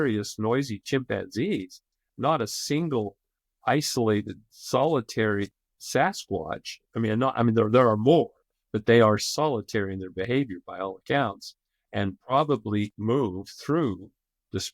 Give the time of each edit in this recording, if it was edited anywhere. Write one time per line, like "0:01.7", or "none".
0:12.9